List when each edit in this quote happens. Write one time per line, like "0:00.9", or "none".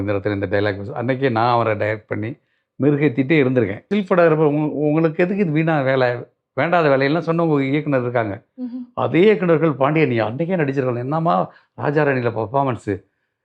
0:03.9